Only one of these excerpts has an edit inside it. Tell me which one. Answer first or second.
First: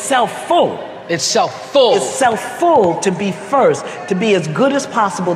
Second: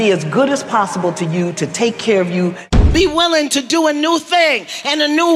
second